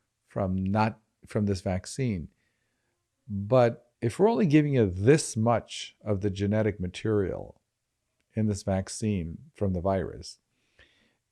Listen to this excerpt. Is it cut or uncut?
cut